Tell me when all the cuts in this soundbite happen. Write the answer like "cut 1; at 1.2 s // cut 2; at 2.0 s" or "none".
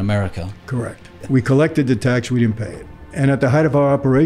cut 1; at 1.2 s // cut 2; at 3.1 s